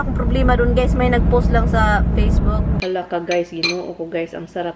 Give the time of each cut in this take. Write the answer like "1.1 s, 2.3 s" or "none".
2.8 s

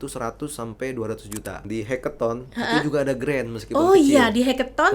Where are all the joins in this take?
1.6 s

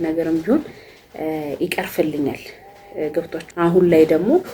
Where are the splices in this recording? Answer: 3.4 s

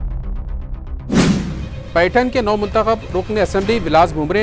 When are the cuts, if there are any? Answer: 1.7 s

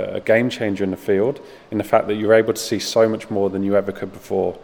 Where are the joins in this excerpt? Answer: none

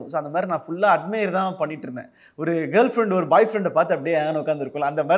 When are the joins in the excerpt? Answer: none

